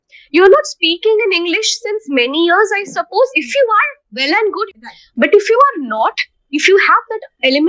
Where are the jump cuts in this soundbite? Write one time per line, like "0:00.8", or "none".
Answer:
0:04.7